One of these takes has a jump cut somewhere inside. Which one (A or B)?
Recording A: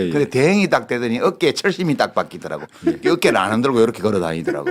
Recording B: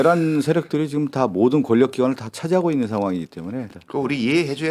B